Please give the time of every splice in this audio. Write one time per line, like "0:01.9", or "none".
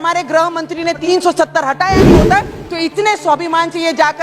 0:01.0